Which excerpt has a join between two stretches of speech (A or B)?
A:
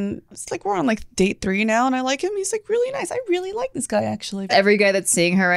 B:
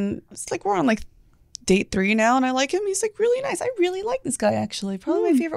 A